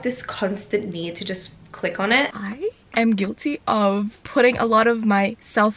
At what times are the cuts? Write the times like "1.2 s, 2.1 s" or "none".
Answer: 2.4 s, 4.2 s